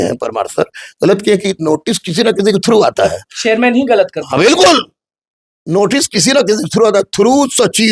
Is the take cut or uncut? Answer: uncut